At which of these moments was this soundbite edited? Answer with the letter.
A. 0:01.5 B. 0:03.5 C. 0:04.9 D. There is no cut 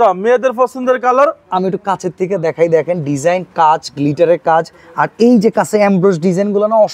D